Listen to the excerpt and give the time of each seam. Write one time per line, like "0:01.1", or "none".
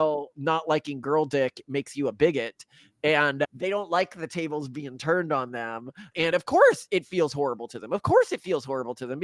none